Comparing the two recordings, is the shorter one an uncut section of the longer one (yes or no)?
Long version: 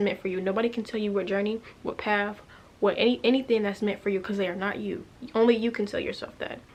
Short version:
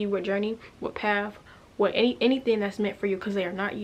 yes